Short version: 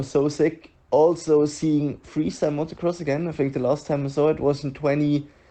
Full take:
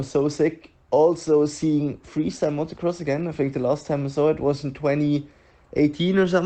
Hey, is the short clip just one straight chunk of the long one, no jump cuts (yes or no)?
yes